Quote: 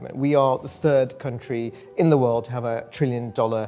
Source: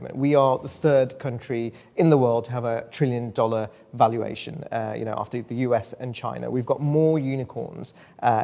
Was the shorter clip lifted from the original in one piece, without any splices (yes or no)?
yes